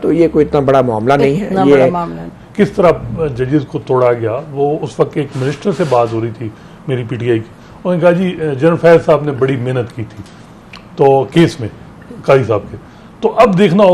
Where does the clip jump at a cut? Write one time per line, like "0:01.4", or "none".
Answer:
0:02.2